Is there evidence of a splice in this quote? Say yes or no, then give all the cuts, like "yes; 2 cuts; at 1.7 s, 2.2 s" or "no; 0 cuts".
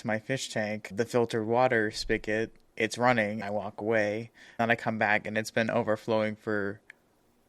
yes; 3 cuts; at 2.6 s, 3.4 s, 4.6 s